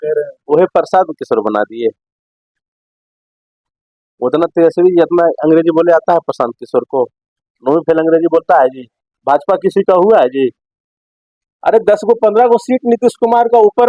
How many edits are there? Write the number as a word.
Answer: one